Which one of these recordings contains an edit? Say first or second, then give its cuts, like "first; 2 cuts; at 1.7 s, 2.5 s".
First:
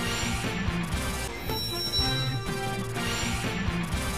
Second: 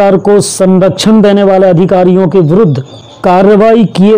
first; 1 cut; at 1.2 s